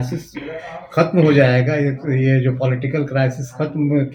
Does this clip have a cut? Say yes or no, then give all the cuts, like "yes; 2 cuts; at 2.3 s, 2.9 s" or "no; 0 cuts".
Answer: no; 0 cuts